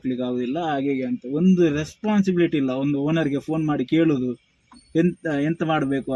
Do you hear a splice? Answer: no; 0 cuts

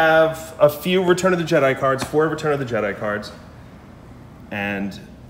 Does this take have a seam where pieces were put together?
no; 0 cuts

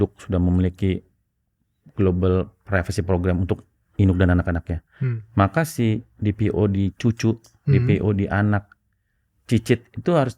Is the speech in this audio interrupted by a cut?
no; 0 cuts

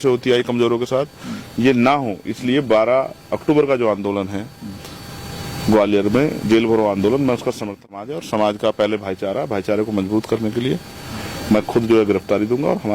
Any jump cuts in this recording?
yes; 1 cut; at 7.9 s

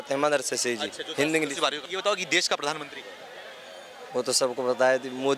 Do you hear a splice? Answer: yes; 1 cut; at 1.8 s

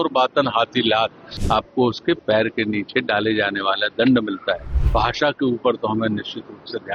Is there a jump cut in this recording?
yes; 2 cuts; at 1.3 s, 4.7 s

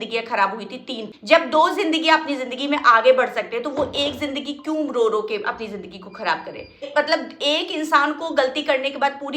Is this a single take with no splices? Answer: no; 2 cuts; at 1.1 s, 6.9 s

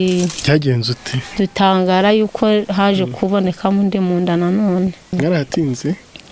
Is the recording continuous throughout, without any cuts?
no; 1 cut; at 5.1 s

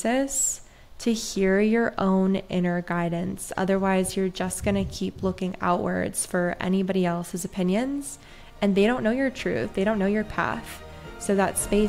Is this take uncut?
yes; 0 cuts

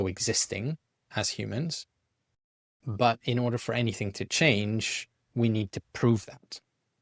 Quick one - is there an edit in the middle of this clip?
no; 0 cuts

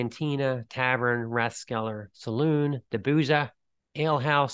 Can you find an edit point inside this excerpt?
no; 0 cuts

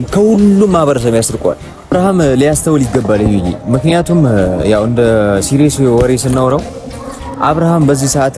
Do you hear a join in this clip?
yes; 1 cut; at 1.9 s

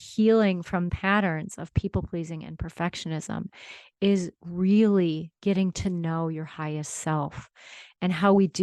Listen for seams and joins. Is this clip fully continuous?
no; 1 cut; at 0.9 s

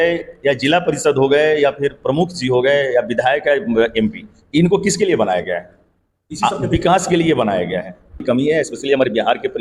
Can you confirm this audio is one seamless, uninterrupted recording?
no; 1 cut; at 8.2 s

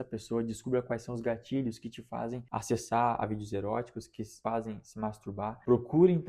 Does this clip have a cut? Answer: yes; 2 cuts; at 2.4 s, 4.3 s

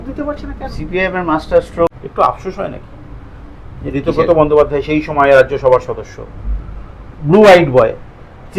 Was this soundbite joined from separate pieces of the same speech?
yes; 1 cut; at 2.0 s

